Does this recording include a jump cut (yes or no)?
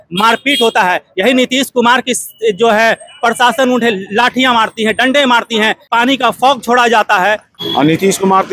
yes